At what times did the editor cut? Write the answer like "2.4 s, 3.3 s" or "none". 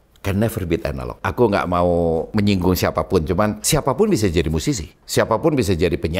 1.2 s, 2.3 s, 3.6 s, 4.9 s